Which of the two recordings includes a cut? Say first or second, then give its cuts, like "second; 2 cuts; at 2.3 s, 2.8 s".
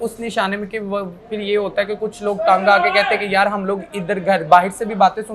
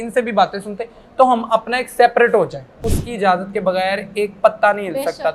second; 1 cut; at 2.9 s